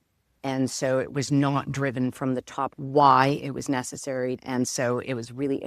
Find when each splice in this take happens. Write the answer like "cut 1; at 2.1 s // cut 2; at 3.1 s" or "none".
cut 1; at 2.7 s // cut 2; at 4.4 s